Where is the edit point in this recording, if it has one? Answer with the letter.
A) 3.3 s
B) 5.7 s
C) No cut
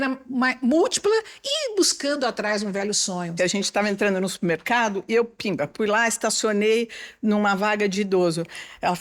A